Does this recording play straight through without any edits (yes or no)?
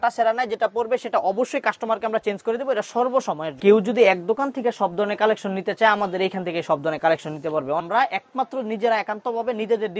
no